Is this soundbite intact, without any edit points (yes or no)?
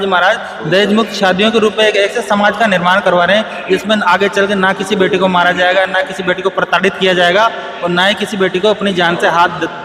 yes